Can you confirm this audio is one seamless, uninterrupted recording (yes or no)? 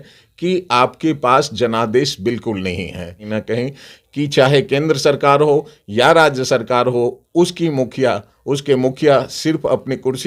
no